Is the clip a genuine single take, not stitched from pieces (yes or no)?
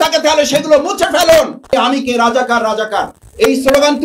no